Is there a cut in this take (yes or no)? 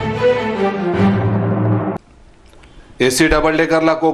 yes